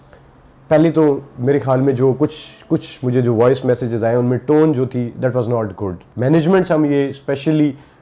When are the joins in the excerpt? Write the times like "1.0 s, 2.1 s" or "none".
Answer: 6.0 s